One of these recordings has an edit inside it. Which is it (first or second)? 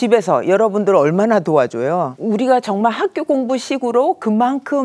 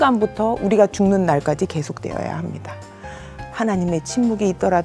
first